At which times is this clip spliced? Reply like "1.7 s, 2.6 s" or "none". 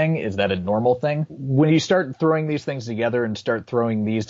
1.3 s